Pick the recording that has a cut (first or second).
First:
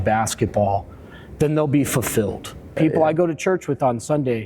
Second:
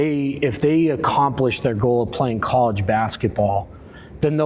first